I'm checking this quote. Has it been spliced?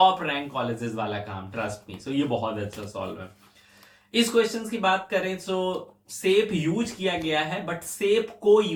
no; 0 cuts

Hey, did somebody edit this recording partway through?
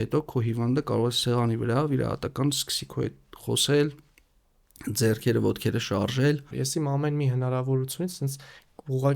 yes; 1 cut; at 6.5 s

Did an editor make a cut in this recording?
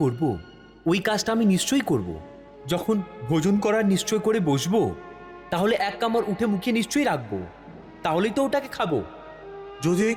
no; 0 cuts

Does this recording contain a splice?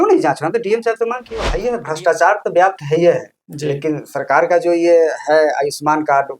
yes; 1 cut; at 1.5 s

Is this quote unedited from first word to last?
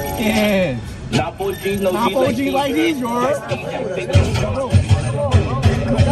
yes; 0 cuts

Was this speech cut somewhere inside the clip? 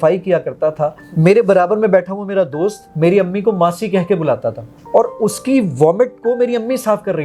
yes; 3 cuts; at 1.0 s, 2.8 s, 4.7 s

